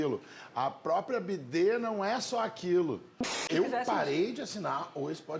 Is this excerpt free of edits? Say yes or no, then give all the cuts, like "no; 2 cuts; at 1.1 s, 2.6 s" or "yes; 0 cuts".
no; 1 cut; at 3.5 s